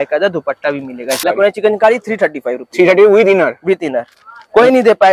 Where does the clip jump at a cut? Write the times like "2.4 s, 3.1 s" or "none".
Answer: 1.2 s